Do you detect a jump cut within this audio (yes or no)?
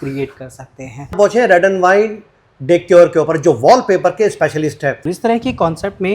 yes